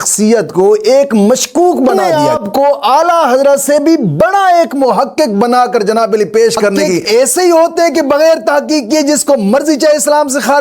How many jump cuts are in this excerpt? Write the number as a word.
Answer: two